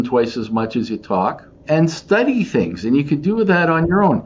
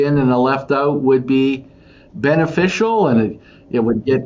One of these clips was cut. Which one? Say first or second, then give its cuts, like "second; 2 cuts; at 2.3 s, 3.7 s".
first; 1 cut; at 1.6 s